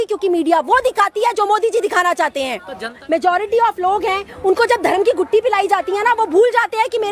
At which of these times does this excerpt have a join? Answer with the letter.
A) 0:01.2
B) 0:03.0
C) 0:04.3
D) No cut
B